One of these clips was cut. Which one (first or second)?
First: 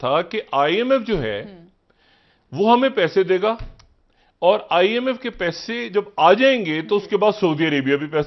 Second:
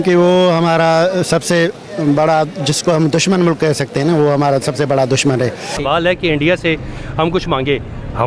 second